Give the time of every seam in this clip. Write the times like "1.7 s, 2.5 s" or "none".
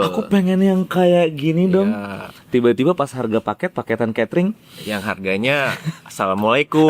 none